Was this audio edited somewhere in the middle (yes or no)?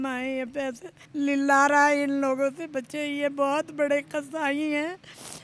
yes